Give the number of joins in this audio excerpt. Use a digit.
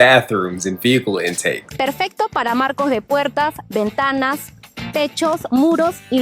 1